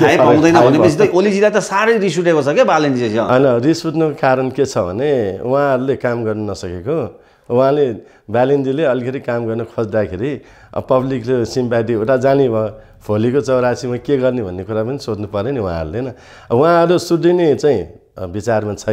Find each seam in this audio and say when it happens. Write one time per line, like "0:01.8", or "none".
none